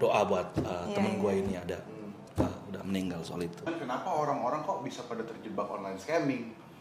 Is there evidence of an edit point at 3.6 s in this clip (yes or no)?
yes